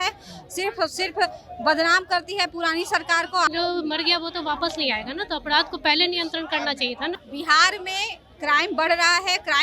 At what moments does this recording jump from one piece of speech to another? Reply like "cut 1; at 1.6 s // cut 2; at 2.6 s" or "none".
cut 1; at 3.5 s // cut 2; at 7.2 s